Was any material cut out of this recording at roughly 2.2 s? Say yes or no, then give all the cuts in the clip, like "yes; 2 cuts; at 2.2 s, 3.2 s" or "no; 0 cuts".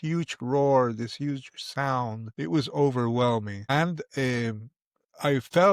yes; 2 cuts; at 2.2 s, 3.6 s